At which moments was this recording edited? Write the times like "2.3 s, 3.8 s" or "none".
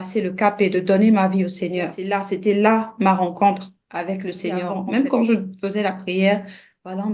2.0 s, 4.7 s